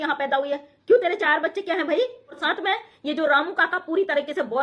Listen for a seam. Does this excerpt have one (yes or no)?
yes